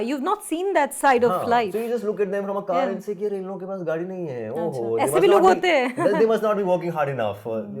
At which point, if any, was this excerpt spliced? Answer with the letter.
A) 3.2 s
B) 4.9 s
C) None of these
C